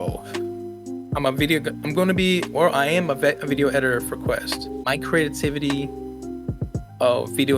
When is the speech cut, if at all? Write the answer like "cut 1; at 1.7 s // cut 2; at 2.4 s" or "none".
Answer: cut 1; at 4.8 s